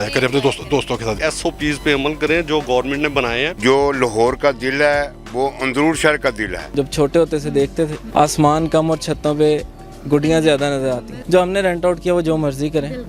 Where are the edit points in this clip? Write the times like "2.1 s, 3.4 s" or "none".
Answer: 1.2 s, 3.5 s, 6.7 s, 8.0 s, 11.1 s